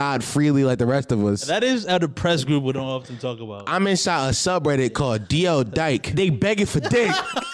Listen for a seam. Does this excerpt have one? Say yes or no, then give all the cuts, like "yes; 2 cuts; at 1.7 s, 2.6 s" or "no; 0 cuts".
yes; 3 cuts; at 1.5 s, 3.6 s, 6.1 s